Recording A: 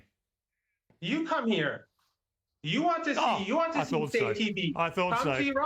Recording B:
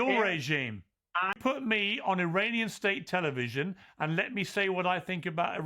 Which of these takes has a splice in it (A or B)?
B